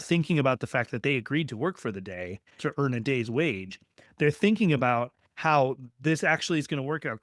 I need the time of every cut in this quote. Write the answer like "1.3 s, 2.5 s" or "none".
2.6 s